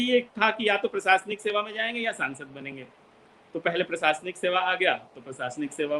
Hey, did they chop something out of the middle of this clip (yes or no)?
no